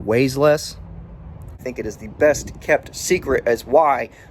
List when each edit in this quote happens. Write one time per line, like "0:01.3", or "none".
0:01.7